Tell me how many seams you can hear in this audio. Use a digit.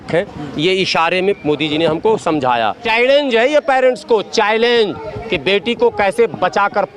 1